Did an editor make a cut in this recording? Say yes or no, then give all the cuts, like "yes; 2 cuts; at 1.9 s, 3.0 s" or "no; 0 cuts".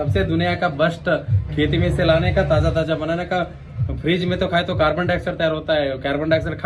no; 0 cuts